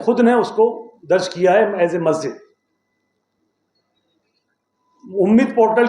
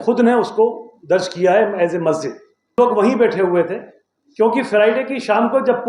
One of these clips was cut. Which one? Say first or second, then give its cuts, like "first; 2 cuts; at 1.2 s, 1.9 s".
second; 1 cut; at 2.8 s